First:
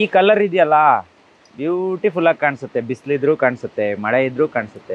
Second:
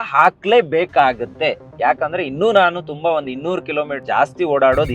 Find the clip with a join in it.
second; 1 cut; at 4.0 s

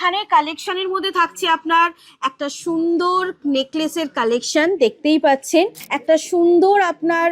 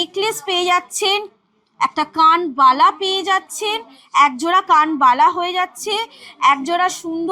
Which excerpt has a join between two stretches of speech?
first; 1 cut; at 5.9 s

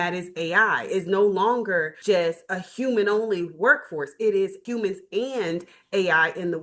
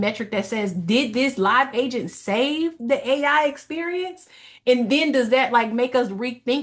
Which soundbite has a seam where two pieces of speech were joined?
first; 2 cuts; at 1.9 s, 4.6 s

